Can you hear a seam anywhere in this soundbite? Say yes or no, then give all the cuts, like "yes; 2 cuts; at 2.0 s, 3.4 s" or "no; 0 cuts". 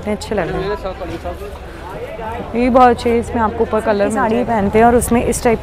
yes; 1 cut; at 4.2 s